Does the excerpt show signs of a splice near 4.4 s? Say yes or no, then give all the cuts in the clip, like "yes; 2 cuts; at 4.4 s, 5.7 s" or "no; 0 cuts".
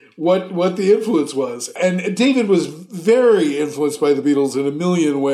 no; 1 cut; at 1.7 s